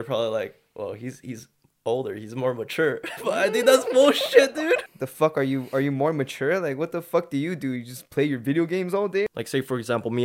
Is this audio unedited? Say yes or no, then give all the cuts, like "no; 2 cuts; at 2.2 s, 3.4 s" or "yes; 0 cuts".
no; 2 cuts; at 4.9 s, 9.3 s